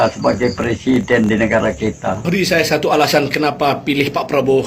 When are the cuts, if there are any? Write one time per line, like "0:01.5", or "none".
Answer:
0:02.2